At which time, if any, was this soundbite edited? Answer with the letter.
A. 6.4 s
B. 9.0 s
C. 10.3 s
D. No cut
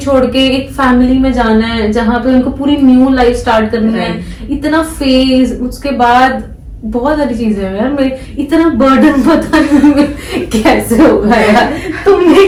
D